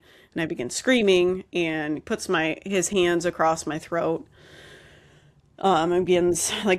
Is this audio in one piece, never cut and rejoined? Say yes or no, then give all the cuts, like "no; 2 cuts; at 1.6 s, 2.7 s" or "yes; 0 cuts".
yes; 0 cuts